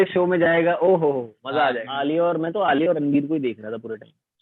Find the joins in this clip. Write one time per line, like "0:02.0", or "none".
0:01.9